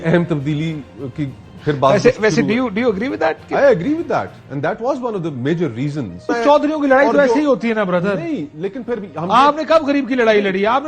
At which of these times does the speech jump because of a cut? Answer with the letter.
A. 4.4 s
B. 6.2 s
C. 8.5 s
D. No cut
B